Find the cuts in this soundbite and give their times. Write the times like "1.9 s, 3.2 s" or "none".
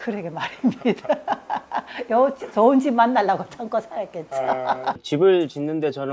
5.0 s